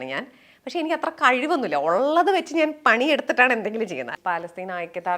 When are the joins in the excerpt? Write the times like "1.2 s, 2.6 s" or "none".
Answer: 4.1 s